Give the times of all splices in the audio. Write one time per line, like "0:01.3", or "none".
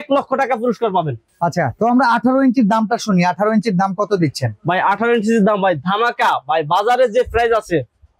none